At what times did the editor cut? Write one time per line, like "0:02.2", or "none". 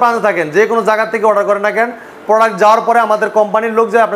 none

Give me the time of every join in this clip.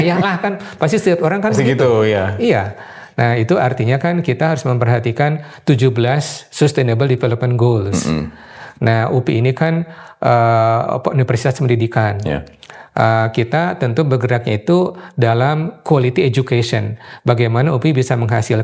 none

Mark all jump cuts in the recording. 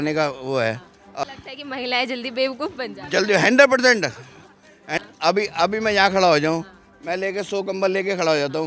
0:01.3
0:05.0

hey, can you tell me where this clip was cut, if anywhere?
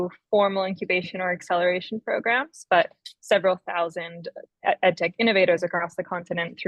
none

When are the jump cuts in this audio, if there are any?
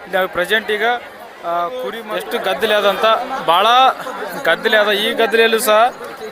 0:02.1

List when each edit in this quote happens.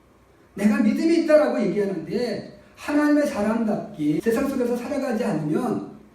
0:04.2

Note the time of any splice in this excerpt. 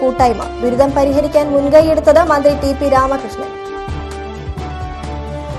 none

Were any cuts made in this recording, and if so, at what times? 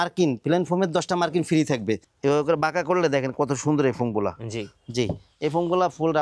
0:02.1

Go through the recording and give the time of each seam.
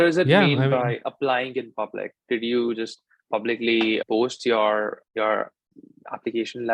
none

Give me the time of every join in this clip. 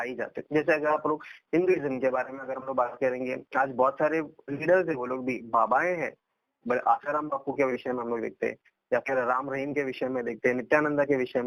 none

